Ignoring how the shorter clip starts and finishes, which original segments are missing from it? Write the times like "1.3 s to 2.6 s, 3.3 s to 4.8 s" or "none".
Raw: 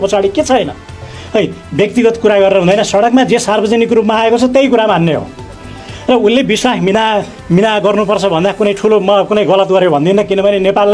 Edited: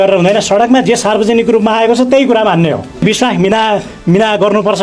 5.4 s to 6.4 s